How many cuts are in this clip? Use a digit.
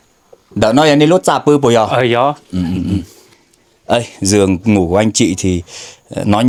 0